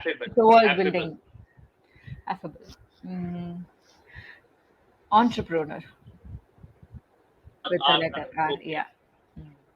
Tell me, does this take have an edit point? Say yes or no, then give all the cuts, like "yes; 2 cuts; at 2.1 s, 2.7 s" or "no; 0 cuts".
yes; 1 cut; at 7.7 s